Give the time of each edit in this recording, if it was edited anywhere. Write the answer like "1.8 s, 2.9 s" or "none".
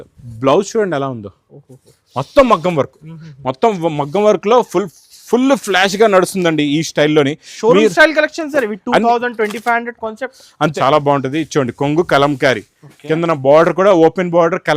10.7 s